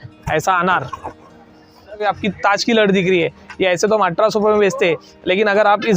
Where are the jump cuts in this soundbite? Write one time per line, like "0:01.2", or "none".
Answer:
0:02.0